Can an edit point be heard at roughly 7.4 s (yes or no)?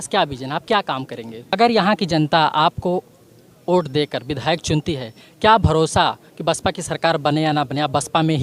no